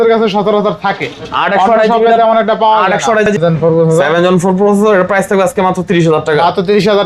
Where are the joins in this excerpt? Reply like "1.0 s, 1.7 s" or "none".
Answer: 3.3 s